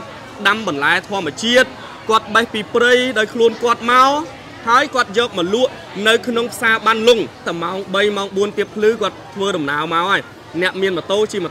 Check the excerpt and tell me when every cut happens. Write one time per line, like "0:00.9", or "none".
0:07.5